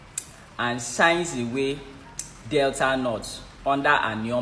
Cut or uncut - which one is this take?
uncut